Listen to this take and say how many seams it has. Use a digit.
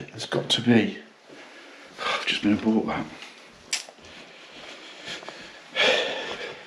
0